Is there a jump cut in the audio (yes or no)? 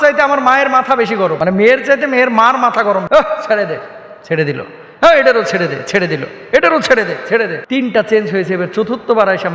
yes